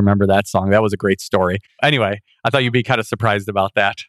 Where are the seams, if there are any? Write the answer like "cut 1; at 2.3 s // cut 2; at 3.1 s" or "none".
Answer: cut 1; at 1.8 s

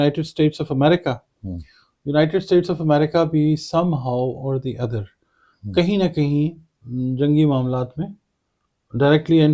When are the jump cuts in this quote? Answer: none

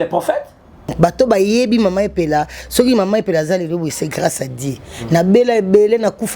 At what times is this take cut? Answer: cut 1; at 0.9 s

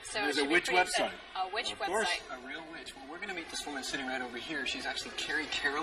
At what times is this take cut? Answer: none

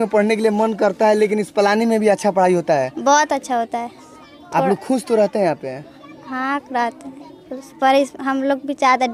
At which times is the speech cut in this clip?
none

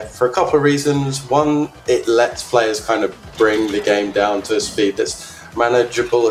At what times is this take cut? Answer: none

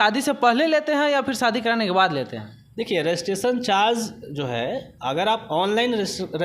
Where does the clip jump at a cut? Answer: none

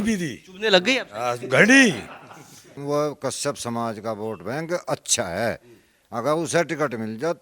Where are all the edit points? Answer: cut 1; at 2.8 s

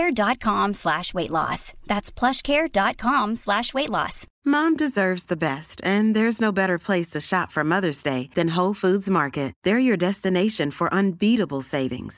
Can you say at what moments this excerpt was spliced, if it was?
cut 1; at 4.2 s

